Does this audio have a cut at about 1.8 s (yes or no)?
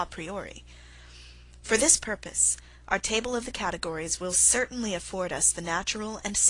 yes